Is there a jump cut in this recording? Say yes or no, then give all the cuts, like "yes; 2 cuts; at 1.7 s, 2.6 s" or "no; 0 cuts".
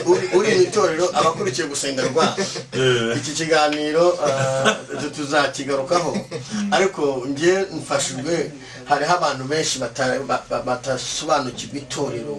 no; 0 cuts